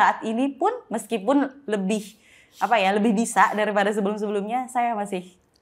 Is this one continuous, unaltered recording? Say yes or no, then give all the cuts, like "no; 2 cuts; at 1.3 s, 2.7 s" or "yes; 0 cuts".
yes; 0 cuts